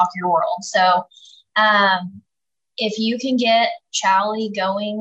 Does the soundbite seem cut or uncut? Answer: uncut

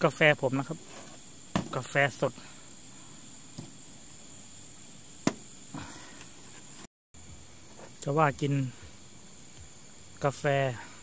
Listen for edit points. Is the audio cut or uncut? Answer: cut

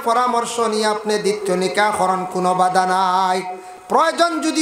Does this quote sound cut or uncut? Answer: uncut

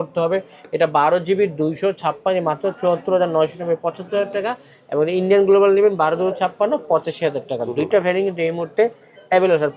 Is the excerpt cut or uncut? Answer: uncut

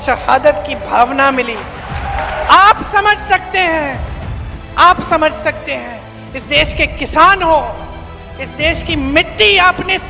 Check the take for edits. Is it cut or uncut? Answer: cut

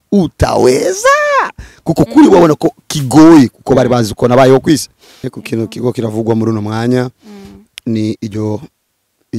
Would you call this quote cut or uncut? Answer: cut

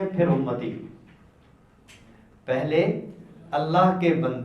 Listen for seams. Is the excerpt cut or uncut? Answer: uncut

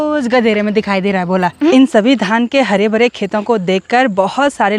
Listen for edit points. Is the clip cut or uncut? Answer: cut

